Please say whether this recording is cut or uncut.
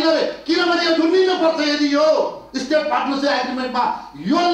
uncut